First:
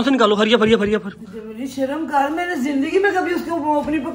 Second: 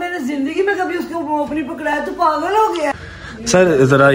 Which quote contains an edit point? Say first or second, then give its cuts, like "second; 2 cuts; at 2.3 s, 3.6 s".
second; 1 cut; at 3.0 s